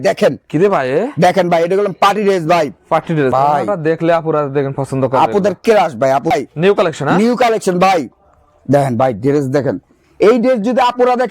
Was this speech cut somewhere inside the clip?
yes; 2 cuts; at 3.3 s, 6.3 s

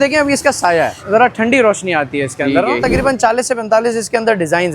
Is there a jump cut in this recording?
yes; 2 cuts; at 1.0 s, 2.8 s

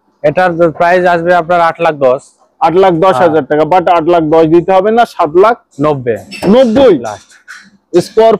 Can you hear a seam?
no; 0 cuts

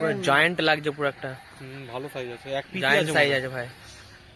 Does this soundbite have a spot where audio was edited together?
no; 0 cuts

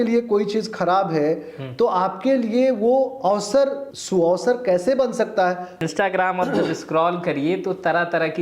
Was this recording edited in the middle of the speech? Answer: yes; 2 cuts; at 3.9 s, 5.8 s

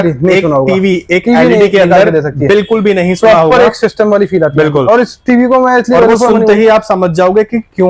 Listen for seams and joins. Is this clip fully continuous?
yes; 0 cuts

